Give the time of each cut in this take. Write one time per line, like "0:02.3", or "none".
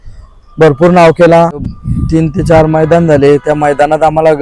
0:01.7